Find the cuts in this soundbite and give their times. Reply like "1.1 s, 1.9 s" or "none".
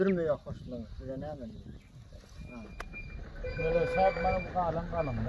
3.1 s

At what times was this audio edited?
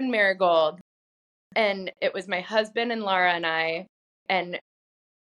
none

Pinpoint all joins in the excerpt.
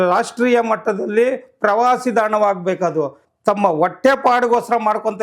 3.2 s

